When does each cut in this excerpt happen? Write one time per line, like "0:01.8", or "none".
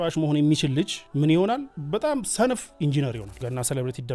0:01.0
0:01.7
0:03.3